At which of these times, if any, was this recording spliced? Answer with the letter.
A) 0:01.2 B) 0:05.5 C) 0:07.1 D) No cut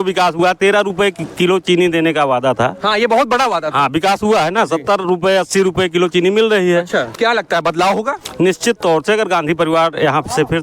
C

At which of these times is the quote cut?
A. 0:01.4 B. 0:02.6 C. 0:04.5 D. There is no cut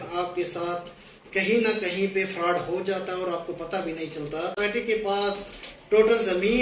C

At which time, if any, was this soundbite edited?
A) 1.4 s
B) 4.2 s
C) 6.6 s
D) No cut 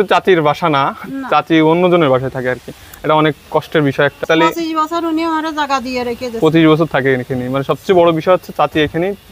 B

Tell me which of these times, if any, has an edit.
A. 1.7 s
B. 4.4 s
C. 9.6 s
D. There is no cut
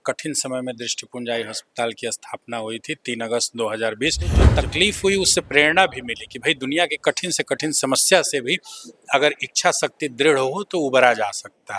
B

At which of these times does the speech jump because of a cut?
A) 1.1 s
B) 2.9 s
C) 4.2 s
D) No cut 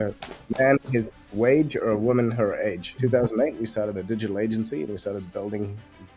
B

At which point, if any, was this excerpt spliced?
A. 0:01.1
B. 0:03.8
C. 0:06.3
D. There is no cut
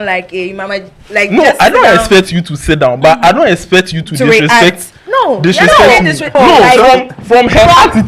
C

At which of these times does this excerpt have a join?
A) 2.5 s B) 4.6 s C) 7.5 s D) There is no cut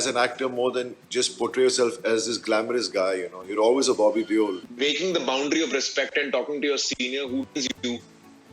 B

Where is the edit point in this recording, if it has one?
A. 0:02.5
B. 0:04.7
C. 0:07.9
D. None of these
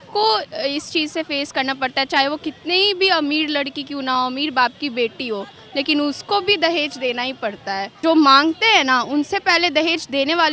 C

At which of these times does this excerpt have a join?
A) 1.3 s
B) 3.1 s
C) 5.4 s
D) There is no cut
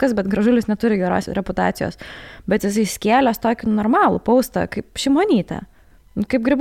A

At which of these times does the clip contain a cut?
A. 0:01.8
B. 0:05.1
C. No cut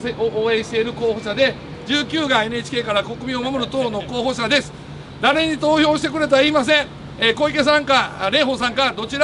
C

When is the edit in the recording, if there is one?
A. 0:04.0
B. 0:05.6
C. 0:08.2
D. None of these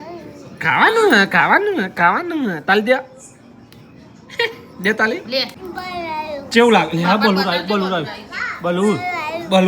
B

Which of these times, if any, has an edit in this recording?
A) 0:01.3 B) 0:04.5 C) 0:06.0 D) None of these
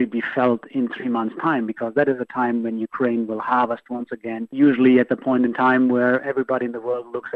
B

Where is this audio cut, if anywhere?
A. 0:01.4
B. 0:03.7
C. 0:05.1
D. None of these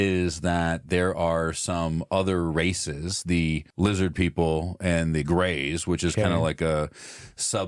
B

